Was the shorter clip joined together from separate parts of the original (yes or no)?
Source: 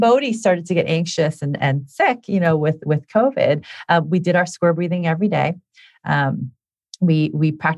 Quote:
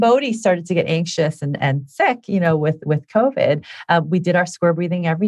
no